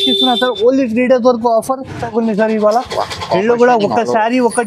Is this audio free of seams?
no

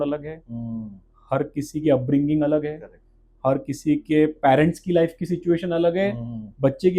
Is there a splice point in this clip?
no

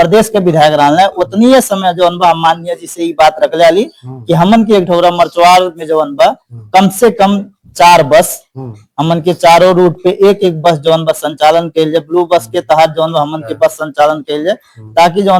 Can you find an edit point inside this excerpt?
no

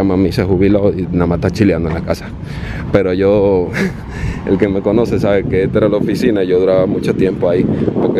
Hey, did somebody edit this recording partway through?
no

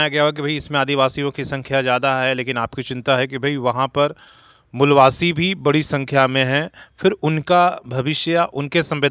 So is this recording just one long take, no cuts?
yes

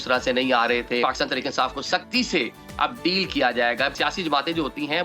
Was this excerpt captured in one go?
no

